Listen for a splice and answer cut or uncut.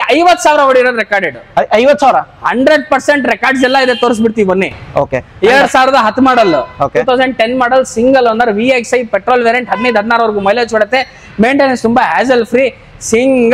uncut